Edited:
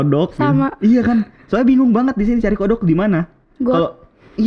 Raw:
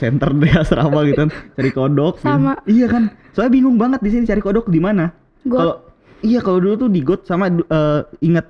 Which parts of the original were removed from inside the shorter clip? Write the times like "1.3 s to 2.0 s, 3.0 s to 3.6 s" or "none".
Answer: none